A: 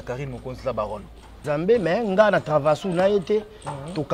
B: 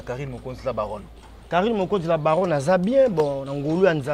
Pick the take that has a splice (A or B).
A